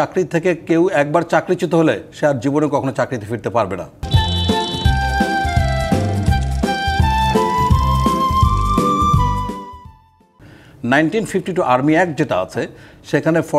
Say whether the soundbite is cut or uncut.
uncut